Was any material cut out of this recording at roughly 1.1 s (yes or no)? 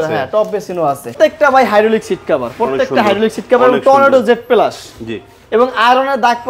yes